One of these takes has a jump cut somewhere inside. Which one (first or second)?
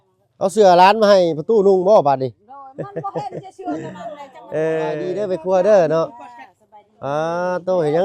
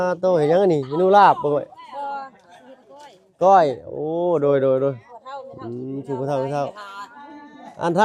first